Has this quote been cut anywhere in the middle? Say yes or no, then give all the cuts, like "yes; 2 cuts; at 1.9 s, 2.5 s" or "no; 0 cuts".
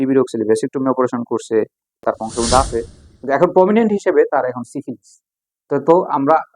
yes; 1 cut; at 2.0 s